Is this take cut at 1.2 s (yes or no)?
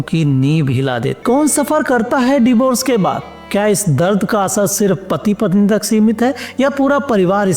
yes